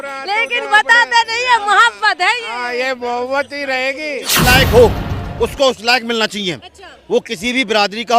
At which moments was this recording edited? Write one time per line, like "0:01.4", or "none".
0:04.3